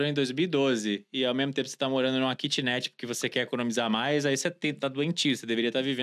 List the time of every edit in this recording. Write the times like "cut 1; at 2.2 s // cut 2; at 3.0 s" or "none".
none